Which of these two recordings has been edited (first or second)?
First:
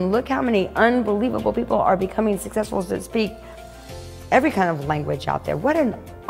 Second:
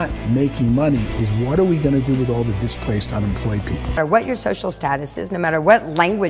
second